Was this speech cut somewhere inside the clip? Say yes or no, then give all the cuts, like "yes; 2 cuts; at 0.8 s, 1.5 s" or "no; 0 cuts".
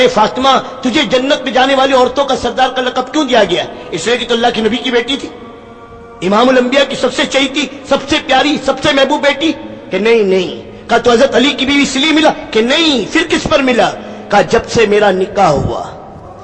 no; 0 cuts